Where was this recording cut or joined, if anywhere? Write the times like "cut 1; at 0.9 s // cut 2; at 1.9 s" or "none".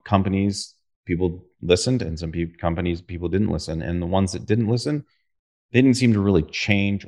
none